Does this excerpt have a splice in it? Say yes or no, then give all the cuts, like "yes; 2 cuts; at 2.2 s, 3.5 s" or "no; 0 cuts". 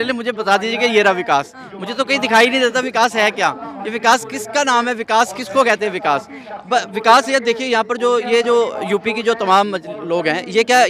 no; 0 cuts